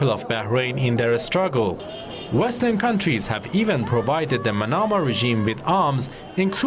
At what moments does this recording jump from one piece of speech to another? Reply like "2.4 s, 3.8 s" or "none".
2.6 s